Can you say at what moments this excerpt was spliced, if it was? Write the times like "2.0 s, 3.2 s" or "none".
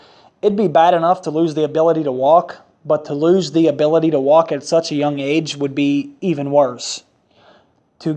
6.8 s